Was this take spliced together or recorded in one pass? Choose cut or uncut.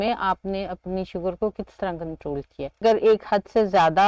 cut